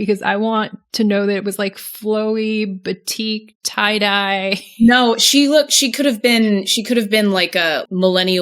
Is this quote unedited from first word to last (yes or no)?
yes